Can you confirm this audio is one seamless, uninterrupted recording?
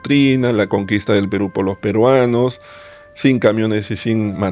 yes; 0 cuts

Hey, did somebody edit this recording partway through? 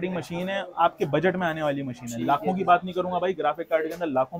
no; 0 cuts

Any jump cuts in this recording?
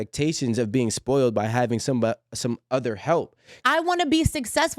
yes; 1 cut; at 3.6 s

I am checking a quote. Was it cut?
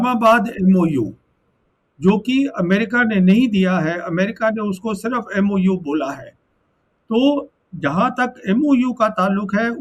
no; 0 cuts

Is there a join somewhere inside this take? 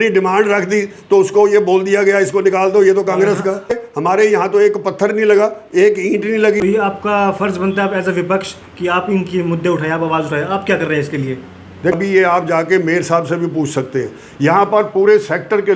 yes; 3 cuts; at 3.7 s, 6.6 s, 11.9 s

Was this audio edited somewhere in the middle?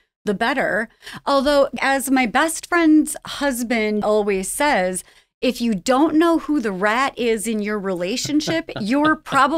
yes; 2 cuts; at 1.8 s, 4.0 s

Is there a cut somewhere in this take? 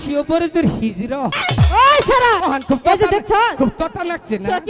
yes; 2 cuts; at 1.4 s, 2.4 s

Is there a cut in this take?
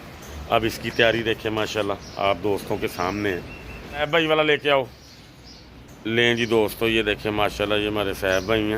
yes; 1 cut; at 4.0 s

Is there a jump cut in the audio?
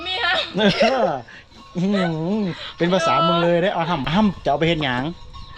yes; 1 cut; at 4.0 s

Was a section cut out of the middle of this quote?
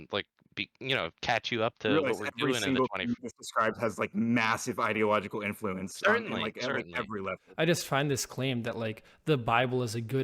yes; 1 cut; at 7.4 s

